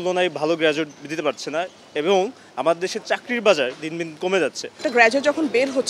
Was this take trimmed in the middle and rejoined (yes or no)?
no